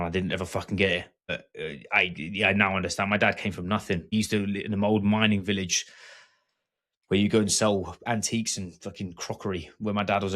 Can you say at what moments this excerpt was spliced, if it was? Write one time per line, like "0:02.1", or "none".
0:01.3
0:04.1